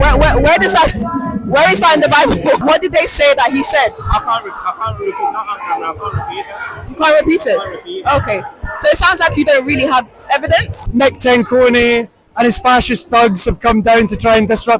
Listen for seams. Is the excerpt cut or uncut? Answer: cut